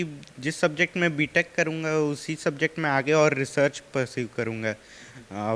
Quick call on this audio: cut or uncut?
uncut